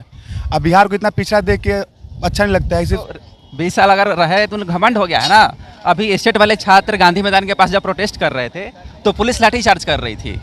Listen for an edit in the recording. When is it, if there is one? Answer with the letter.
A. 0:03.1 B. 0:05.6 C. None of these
A